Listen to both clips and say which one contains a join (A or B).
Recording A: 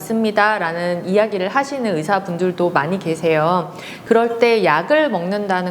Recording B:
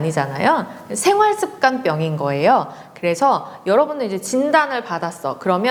A